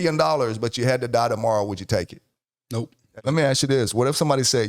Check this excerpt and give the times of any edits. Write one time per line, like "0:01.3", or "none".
0:03.0